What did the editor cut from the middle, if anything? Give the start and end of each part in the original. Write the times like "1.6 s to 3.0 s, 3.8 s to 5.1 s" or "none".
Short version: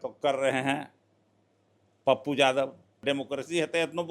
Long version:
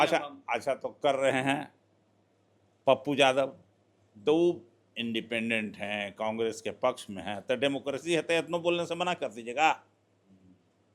3.8 s to 7.6 s